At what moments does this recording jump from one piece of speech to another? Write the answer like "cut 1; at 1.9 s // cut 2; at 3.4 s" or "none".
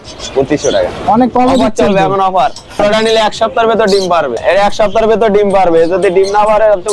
cut 1; at 2.8 s // cut 2; at 4.4 s

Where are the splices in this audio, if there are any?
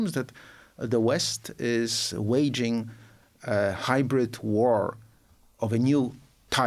none

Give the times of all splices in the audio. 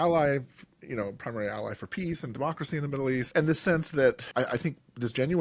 cut 1; at 3.3 s // cut 2; at 4.2 s

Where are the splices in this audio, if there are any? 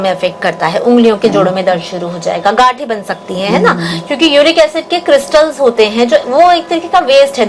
none

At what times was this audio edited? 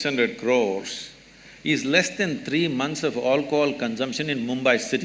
none

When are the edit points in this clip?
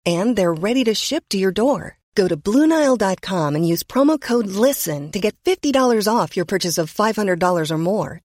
none

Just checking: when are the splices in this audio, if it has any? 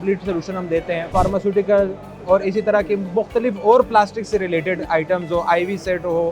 cut 1; at 1.1 s

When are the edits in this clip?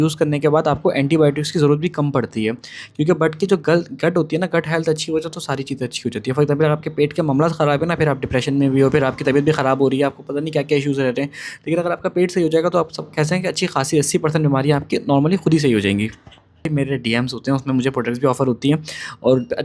cut 1; at 16.7 s

